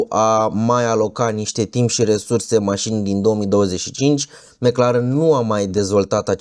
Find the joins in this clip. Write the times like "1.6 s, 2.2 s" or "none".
none